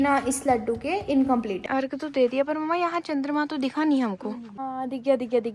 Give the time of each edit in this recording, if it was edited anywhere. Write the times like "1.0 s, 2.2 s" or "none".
1.7 s, 4.6 s